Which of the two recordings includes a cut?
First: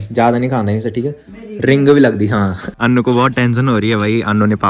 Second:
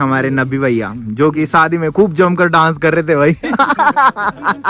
first; 1 cut; at 2.7 s

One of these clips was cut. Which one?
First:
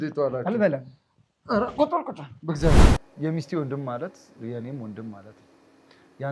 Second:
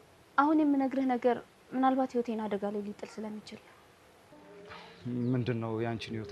first; 1 cut; at 3.0 s

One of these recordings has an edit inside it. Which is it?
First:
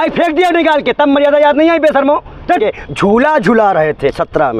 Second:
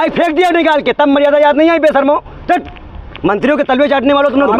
first; 1 cut; at 2.6 s

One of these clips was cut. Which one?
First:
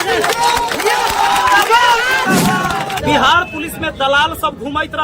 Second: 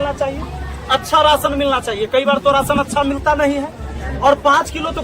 first; 1 cut; at 3.0 s

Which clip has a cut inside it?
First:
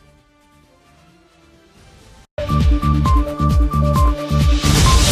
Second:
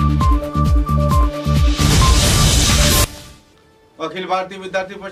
second; 1 cut; at 3.2 s

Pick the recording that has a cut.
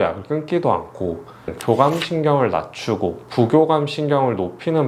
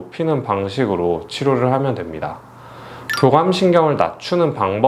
first; 1 cut; at 1.5 s

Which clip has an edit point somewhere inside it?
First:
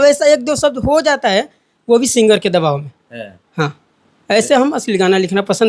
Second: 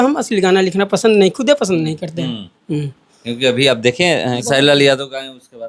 second; 1 cut; at 4.4 s

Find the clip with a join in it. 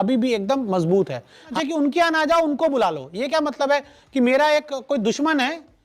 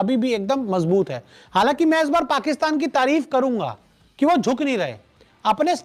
first; 1 cut; at 1.5 s

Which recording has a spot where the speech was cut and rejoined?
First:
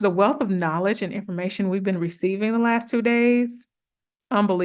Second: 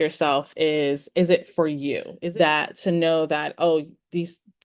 second; 1 cut; at 2.1 s

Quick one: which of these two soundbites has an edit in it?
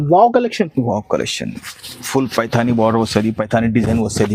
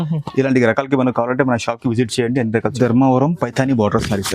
second; 1 cut; at 2.7 s

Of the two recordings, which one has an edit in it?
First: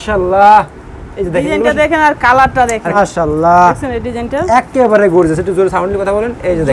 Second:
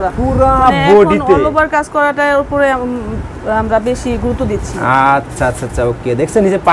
first; 1 cut; at 3.0 s

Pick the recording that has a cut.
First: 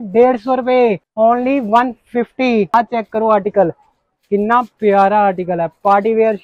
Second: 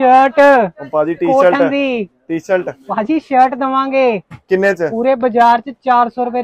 first; 2 cuts; at 1.0 s, 2.7 s

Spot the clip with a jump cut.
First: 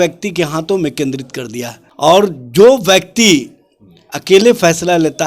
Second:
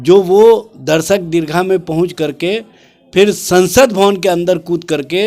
first; 1 cut; at 2.1 s

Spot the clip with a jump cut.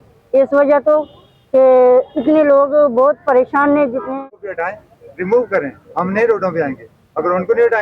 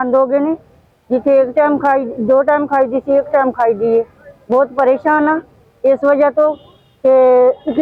first; 1 cut; at 4.2 s

